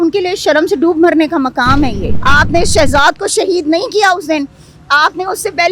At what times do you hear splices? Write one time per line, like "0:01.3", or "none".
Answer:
0:02.1

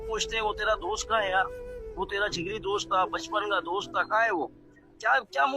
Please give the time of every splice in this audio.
none

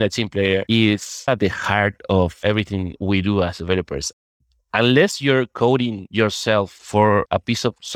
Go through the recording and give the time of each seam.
0:01.3
0:04.3

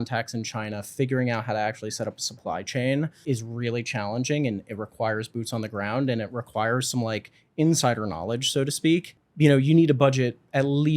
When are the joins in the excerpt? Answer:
0:03.2
0:09.2

